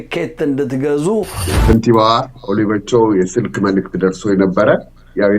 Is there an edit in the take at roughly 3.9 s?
no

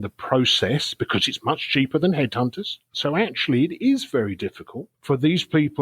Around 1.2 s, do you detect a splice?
no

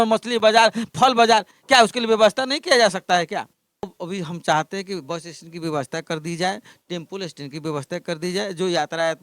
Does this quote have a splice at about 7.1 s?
no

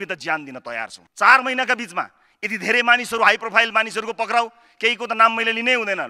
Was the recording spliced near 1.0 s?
yes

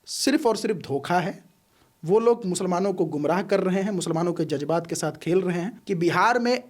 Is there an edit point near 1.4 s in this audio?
no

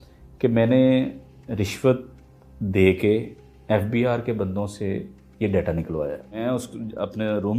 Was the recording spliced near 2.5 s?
no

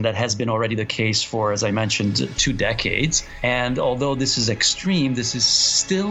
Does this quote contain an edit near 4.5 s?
no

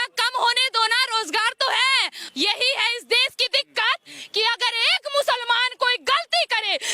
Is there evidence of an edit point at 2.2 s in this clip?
yes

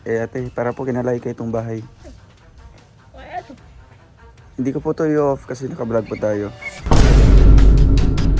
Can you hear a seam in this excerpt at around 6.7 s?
yes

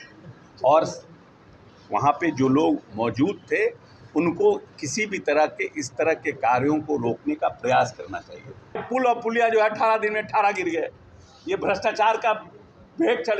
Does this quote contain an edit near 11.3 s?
no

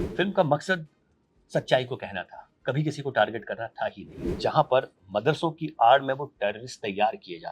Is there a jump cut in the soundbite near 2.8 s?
no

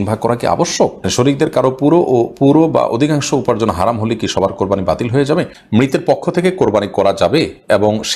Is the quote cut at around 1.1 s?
yes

